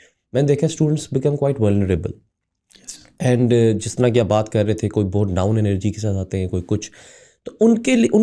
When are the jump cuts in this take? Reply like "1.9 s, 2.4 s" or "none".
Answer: none